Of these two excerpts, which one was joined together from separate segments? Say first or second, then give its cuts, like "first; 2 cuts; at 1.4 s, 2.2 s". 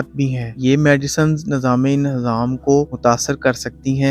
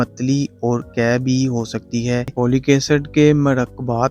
second; 1 cut; at 2.3 s